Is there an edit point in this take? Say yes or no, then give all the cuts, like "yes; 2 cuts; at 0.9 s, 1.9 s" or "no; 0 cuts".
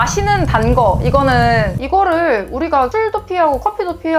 yes; 1 cut; at 1.8 s